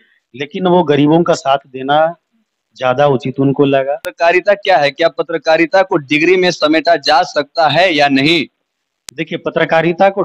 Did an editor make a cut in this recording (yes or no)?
yes